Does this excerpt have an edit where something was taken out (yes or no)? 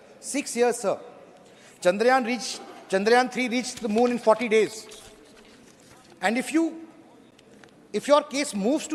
no